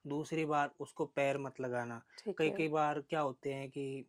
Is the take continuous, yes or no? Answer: yes